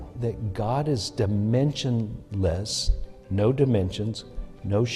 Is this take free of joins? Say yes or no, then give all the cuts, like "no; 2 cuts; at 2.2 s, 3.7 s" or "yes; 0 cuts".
yes; 0 cuts